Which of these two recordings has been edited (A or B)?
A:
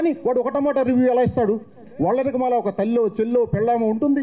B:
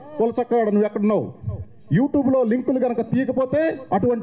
A